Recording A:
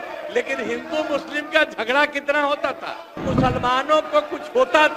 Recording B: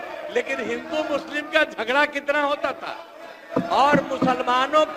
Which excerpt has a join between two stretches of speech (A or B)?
A